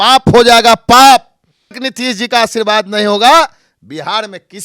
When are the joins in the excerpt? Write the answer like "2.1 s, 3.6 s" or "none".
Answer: 1.8 s